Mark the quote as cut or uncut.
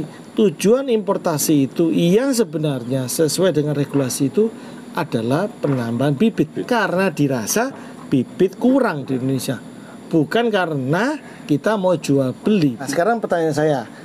cut